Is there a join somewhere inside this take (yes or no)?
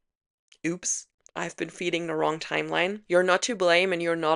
no